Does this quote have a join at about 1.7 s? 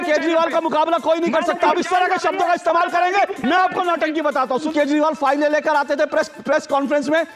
yes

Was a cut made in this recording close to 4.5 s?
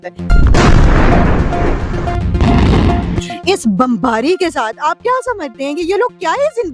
no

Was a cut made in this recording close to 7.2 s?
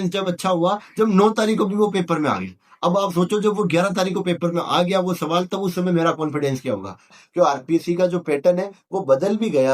yes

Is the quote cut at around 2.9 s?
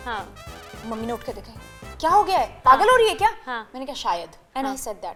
no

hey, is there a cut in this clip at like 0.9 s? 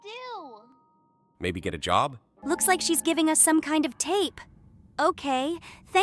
no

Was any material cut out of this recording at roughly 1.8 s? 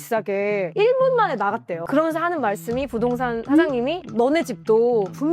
yes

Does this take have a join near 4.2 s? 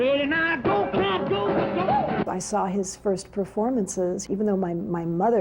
yes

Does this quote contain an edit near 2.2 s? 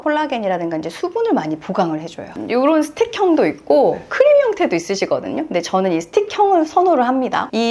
yes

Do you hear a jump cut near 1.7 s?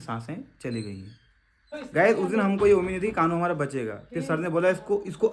yes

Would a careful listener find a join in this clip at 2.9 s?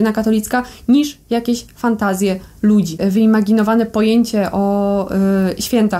yes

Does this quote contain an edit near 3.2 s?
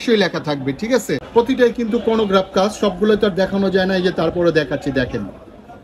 no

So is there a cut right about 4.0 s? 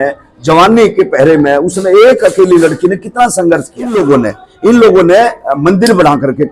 yes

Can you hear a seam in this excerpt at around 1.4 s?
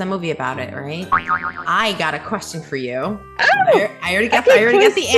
yes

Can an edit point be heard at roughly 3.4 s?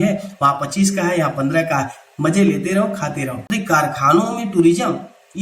yes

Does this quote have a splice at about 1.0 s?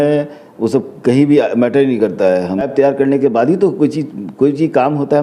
no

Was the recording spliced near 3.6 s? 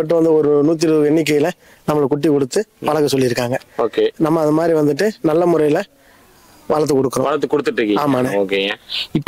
no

